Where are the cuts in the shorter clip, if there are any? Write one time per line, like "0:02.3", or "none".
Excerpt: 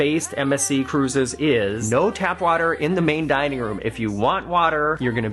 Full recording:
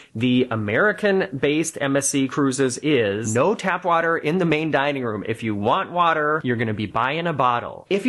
none